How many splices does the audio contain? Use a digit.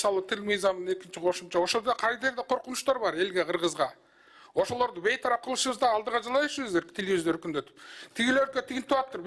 0